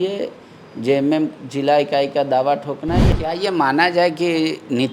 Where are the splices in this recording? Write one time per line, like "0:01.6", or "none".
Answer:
0:03.1